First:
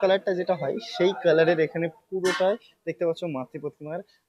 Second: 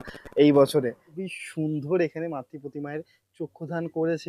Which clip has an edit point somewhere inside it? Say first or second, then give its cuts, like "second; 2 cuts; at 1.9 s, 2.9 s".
second; 1 cut; at 1.0 s